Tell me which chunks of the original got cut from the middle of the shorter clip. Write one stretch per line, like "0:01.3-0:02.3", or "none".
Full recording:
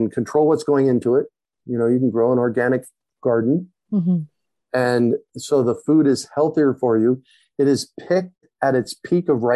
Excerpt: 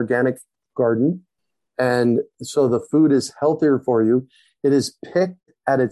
0:03.8-0:04.3